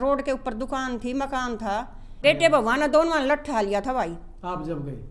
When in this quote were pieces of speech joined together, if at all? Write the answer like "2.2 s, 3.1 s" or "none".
2.1 s